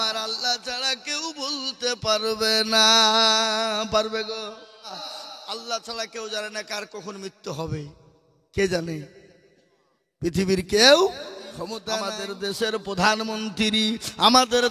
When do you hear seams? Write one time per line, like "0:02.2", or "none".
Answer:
0:05.0
0:11.7

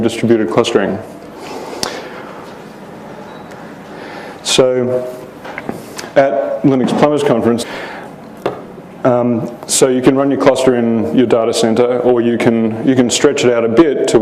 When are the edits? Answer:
none

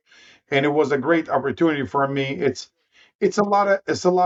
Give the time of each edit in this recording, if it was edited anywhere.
none

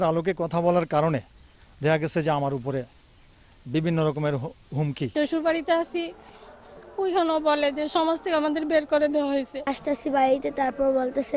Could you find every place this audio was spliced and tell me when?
0:05.0
0:09.6

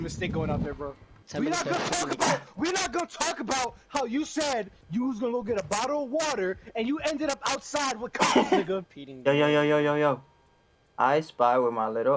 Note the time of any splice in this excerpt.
0:01.1
0:04.8
0:08.9

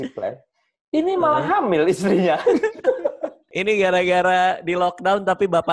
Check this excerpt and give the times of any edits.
0:03.5

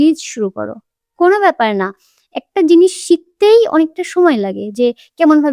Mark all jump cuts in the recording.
none

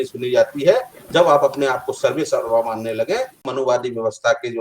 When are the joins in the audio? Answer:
0:03.4

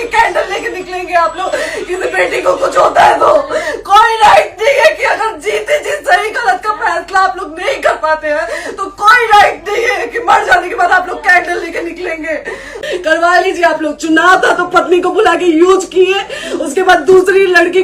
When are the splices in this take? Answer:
0:12.8

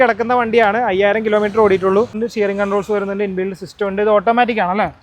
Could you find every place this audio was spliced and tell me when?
0:02.2

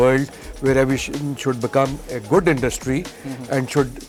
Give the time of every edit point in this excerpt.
none

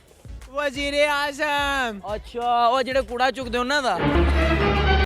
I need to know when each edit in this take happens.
0:04.0

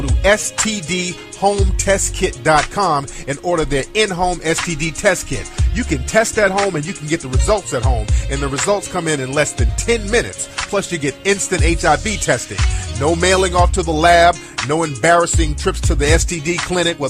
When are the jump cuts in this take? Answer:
none

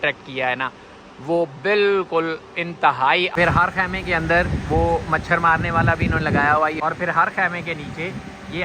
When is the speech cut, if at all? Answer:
0:03.3
0:06.8

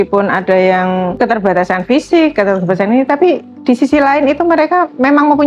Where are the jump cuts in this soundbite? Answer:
0:01.1

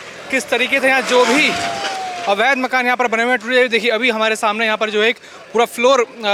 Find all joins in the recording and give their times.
none

